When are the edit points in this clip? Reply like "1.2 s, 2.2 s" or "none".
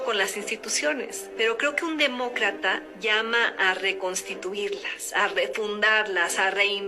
1.2 s